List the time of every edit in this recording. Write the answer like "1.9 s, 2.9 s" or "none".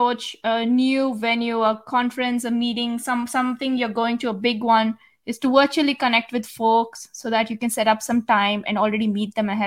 none